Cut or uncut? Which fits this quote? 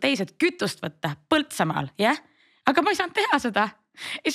uncut